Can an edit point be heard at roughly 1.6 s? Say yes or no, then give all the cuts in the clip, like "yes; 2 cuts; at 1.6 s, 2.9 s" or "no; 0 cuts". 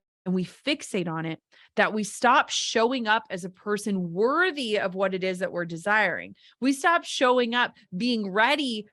no; 0 cuts